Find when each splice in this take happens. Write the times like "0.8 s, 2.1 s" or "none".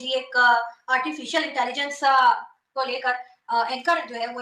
none